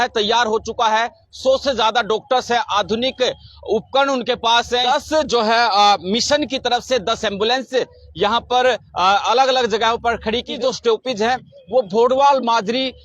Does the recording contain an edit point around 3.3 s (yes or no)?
no